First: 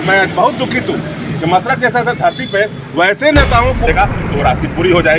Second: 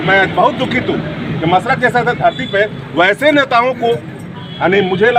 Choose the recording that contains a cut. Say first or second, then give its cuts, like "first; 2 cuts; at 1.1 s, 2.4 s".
first; 1 cut; at 3.9 s